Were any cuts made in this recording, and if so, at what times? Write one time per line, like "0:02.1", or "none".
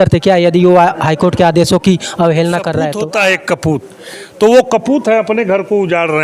0:02.9